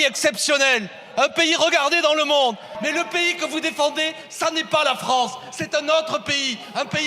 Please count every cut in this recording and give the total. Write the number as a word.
one